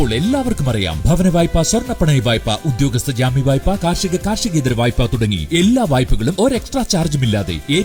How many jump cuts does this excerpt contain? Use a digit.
0